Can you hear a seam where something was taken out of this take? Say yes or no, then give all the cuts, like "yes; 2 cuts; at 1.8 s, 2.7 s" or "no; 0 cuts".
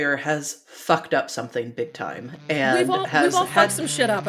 no; 0 cuts